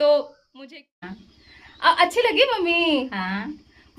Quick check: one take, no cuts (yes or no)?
no